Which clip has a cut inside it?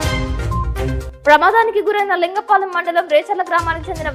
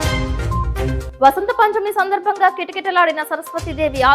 second; 1 cut; at 1.0 s

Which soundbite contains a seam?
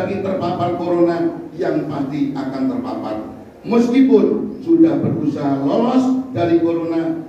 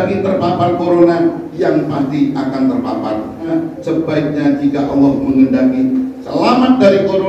second; 1 cut; at 3.5 s

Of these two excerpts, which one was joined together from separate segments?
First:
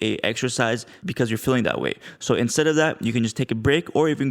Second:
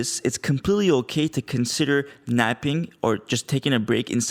first; 1 cut; at 1.0 s

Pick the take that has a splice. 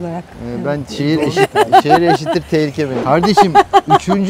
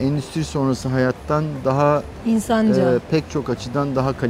first; 1 cut; at 3.0 s

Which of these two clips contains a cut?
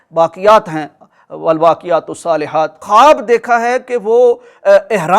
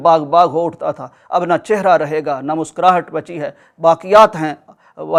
first; 1 cut; at 2.8 s

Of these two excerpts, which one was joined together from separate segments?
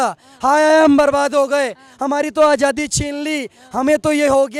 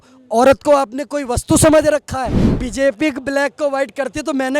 second; 1 cut; at 2.5 s

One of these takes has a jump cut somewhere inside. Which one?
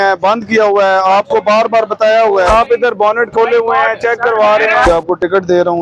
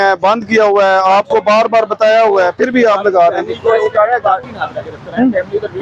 first; 2 cuts; at 2.5 s, 4.9 s

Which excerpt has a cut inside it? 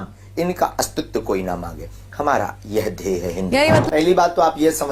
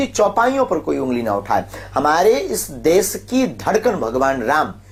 first; 1 cut; at 3.8 s

